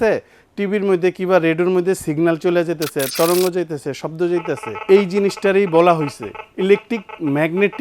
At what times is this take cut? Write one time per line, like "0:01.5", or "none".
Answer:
none